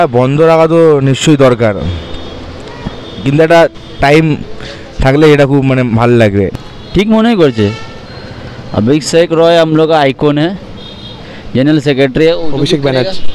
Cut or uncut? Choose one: uncut